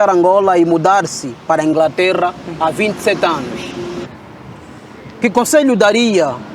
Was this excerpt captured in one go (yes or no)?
no